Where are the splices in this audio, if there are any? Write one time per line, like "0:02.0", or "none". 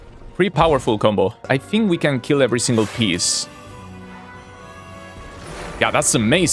0:01.4